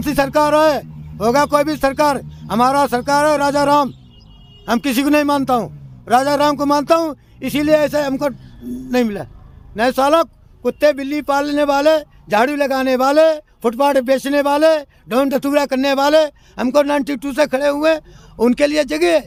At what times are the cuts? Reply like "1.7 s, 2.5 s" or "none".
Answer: none